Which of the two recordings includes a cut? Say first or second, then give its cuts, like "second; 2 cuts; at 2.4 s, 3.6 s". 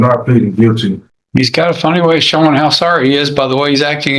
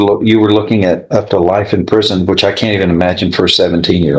first; 1 cut; at 0.9 s